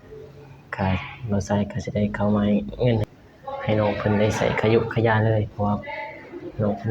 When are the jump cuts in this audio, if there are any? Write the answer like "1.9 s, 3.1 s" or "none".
3.0 s